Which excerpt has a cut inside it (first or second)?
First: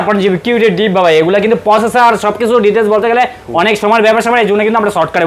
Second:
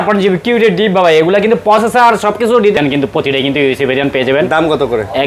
second